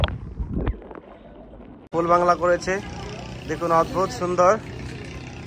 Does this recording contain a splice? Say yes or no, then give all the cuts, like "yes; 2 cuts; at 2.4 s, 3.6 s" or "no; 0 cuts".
yes; 1 cut; at 1.9 s